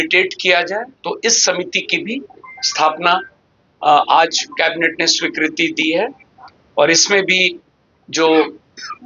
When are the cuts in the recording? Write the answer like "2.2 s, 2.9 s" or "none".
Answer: none